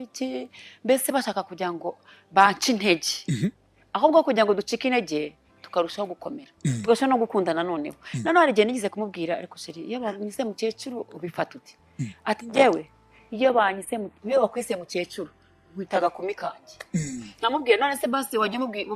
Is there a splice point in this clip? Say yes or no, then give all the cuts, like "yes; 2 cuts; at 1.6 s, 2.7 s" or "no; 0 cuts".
no; 0 cuts